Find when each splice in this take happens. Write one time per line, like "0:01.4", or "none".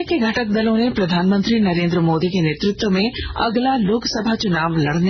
none